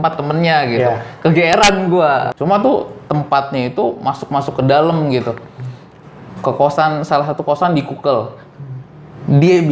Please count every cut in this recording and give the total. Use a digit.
1